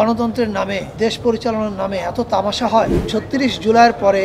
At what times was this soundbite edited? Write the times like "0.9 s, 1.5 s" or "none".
0.9 s, 3.0 s